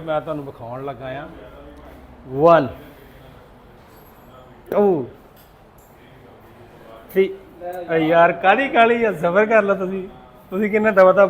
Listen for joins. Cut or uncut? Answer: uncut